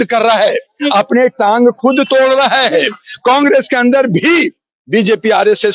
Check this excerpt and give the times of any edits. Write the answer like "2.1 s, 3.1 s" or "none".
none